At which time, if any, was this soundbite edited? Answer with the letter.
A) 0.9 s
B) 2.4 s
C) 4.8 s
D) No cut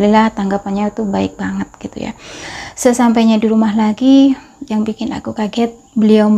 B